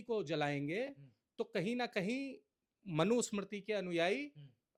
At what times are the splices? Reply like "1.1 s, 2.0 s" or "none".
none